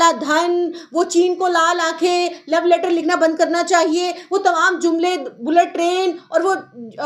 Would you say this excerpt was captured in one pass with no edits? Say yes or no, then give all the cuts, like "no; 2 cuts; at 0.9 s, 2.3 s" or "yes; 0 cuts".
yes; 0 cuts